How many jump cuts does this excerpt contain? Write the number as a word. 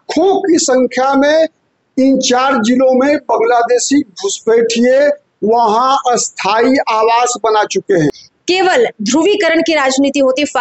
one